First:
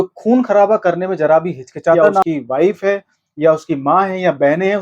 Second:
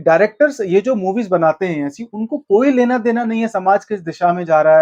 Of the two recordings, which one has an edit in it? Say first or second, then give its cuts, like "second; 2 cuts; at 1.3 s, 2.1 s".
first; 1 cut; at 2.2 s